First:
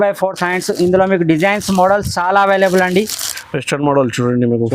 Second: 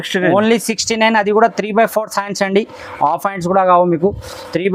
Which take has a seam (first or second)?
first